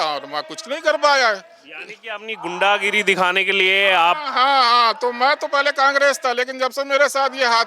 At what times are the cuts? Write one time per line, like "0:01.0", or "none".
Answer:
none